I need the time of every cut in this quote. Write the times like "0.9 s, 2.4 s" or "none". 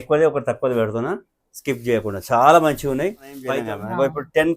3.5 s

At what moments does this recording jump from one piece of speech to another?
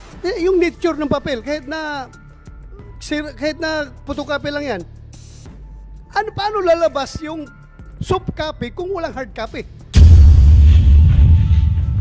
9.8 s

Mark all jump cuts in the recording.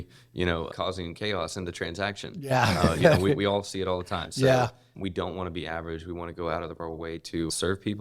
none

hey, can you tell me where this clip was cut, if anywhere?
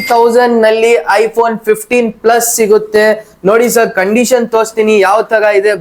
none

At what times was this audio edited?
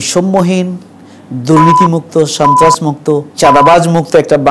3.3 s

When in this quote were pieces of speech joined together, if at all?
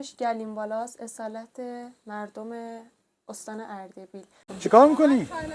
4.5 s

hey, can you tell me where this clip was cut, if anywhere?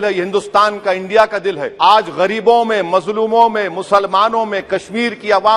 1.7 s

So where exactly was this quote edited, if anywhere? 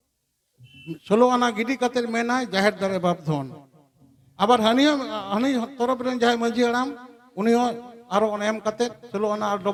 none

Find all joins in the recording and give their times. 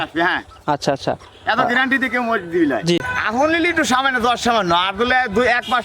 3.0 s

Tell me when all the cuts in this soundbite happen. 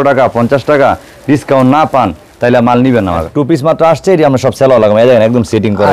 3.3 s

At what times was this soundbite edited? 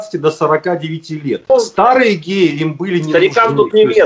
1.5 s

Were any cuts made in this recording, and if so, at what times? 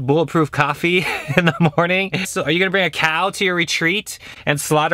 2.3 s

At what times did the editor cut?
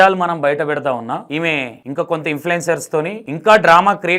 1.5 s, 3.2 s

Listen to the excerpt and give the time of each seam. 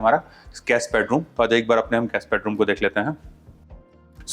none

